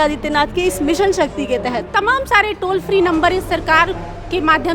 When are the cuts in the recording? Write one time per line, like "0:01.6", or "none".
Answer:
0:01.9